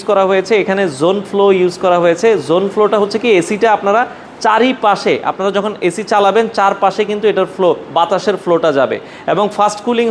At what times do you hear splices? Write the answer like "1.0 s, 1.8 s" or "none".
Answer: none